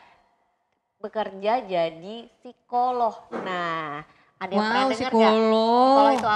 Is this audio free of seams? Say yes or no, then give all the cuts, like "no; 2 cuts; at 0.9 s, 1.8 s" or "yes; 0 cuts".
yes; 0 cuts